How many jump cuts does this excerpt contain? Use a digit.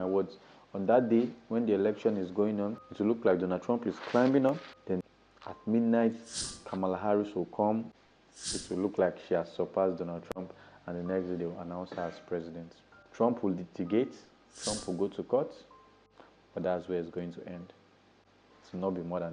0